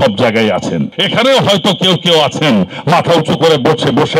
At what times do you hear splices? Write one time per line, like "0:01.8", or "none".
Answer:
0:01.0